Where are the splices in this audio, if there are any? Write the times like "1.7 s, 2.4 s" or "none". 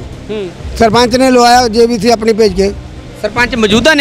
none